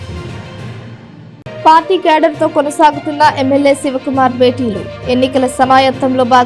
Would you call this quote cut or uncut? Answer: uncut